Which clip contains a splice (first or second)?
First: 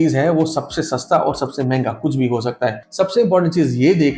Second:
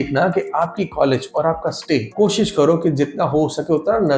first